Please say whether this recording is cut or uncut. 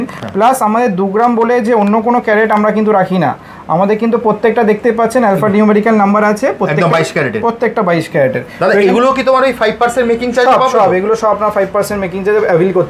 uncut